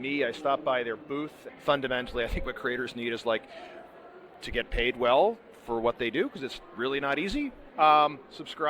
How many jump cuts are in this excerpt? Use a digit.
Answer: 2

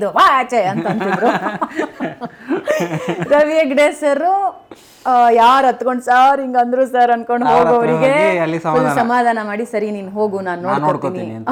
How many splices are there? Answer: 0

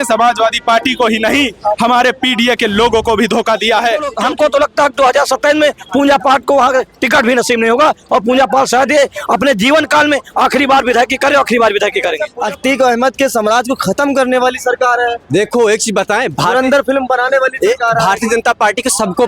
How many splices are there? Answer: 2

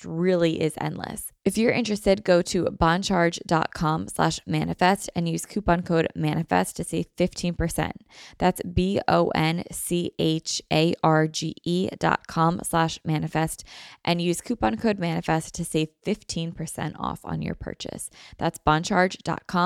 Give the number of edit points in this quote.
1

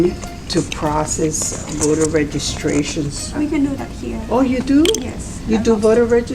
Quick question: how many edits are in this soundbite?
2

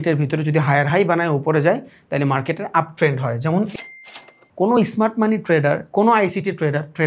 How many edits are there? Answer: 1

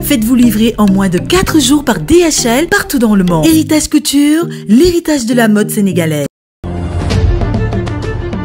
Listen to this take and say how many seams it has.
0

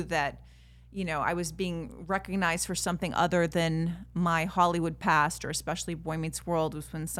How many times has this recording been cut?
0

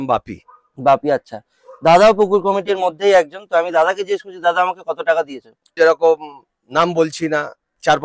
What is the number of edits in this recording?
1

